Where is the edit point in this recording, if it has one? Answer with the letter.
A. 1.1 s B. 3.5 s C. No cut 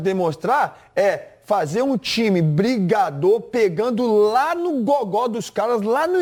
C